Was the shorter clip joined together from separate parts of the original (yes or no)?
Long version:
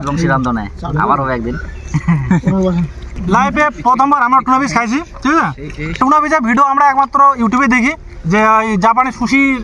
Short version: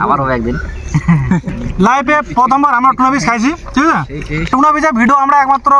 yes